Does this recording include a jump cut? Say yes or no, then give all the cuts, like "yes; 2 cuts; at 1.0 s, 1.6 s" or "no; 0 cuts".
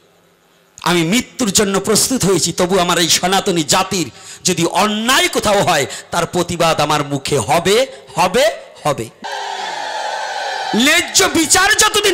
yes; 1 cut; at 9.1 s